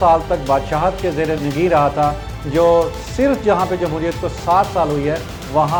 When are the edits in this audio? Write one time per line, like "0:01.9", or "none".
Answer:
none